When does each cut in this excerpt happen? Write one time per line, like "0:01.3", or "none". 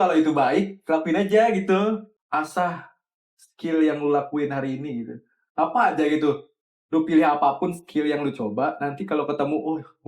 0:02.1